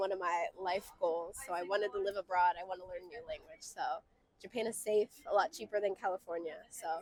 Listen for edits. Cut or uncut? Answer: uncut